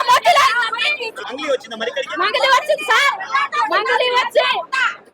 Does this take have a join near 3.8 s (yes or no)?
no